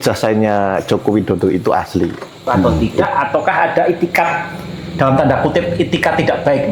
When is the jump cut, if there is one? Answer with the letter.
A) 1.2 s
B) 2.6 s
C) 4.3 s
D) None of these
B